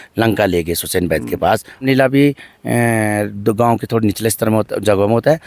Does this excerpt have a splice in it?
yes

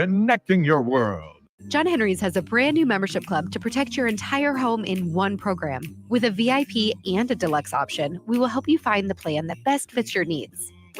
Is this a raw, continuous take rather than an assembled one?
no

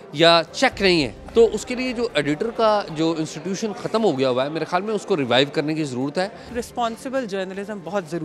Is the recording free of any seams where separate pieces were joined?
no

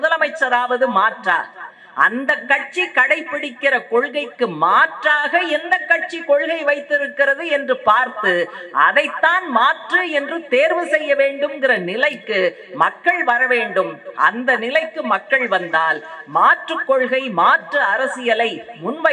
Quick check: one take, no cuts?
yes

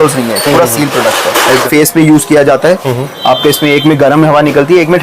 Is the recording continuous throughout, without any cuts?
no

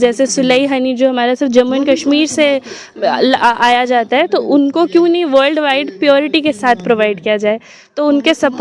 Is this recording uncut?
yes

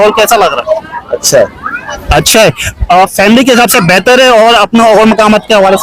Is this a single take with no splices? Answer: yes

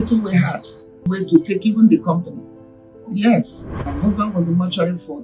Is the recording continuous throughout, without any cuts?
no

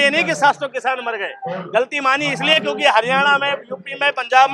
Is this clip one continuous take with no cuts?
yes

